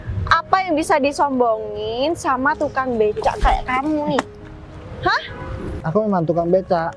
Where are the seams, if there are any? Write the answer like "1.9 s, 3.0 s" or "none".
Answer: 5.7 s

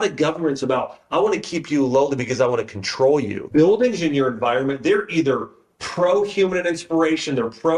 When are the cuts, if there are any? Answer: 3.4 s

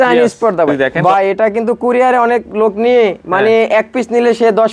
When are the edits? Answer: 0.9 s

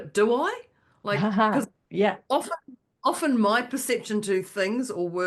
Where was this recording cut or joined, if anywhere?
1.8 s

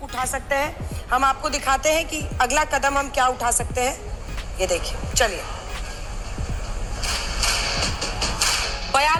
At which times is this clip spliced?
none

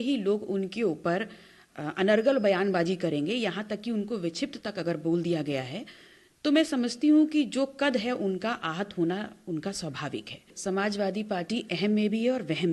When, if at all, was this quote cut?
10.5 s

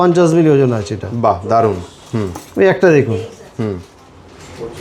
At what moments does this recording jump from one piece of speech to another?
none

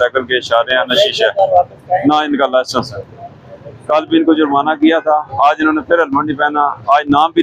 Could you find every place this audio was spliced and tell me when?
none

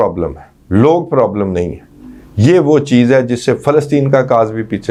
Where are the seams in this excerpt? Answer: none

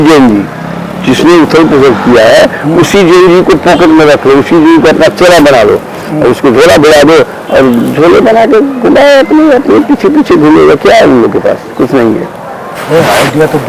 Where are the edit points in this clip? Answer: none

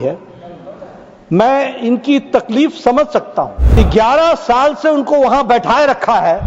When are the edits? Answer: 3.8 s

